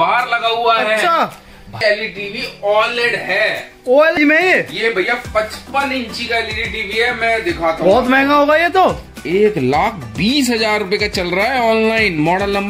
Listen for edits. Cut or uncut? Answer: cut